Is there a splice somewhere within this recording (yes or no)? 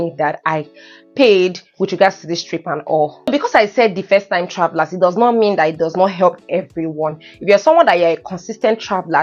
no